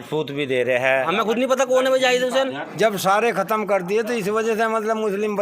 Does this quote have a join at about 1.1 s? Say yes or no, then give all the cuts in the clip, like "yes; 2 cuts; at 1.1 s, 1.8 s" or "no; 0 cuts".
yes; 2 cuts; at 1.1 s, 2.6 s